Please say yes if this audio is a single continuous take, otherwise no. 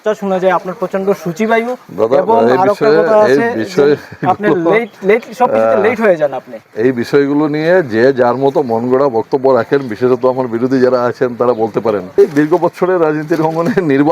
no